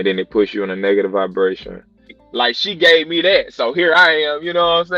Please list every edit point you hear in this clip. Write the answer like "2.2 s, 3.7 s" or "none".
2.2 s